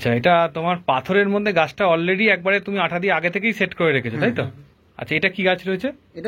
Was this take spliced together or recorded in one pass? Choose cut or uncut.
uncut